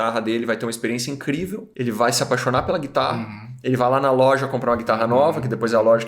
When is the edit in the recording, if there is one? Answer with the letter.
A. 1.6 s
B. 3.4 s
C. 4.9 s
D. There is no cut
A